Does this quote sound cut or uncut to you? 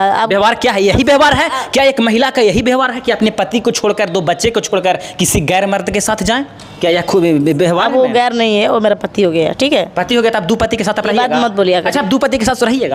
uncut